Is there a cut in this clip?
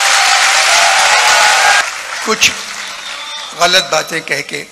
yes; 1 cut; at 1.8 s

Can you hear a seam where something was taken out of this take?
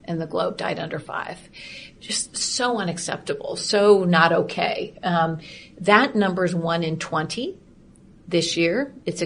no; 0 cuts

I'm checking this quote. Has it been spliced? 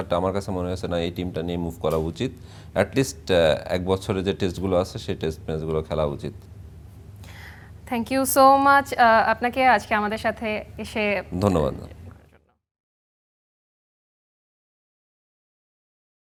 no; 0 cuts

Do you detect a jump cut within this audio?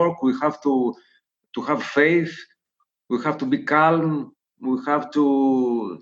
no; 0 cuts

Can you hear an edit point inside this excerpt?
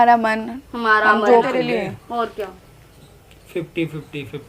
yes; 1 cut; at 1.5 s

